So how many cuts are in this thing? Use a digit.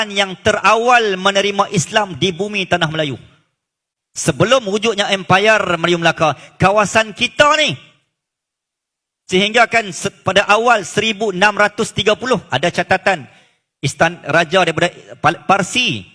0